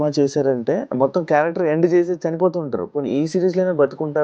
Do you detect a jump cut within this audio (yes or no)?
yes